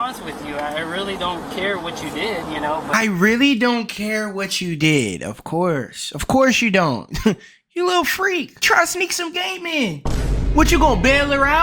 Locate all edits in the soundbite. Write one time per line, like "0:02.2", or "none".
0:02.9
0:08.6